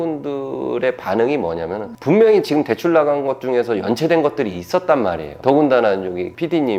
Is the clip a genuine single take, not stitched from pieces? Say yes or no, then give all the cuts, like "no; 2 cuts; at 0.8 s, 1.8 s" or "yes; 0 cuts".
yes; 0 cuts